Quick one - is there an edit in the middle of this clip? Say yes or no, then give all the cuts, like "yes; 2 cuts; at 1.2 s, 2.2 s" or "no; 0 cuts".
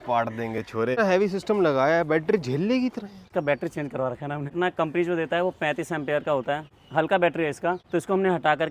yes; 5 cuts; at 1.0 s, 3.3 s, 4.5 s, 6.7 s, 7.8 s